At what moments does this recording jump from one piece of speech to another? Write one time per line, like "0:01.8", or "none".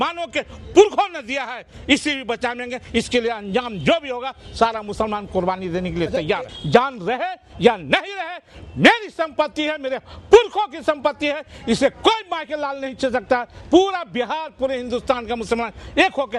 0:06.5